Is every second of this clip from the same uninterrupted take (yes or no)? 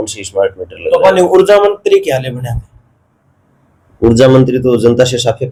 yes